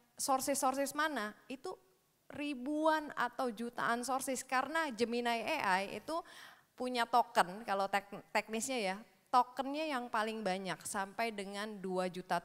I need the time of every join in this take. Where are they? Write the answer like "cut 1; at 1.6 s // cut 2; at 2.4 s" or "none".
none